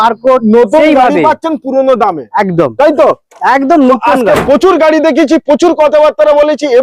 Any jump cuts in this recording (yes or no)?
no